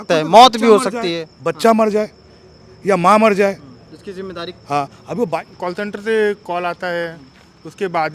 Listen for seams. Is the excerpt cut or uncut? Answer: cut